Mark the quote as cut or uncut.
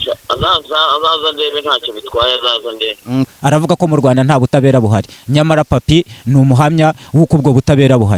cut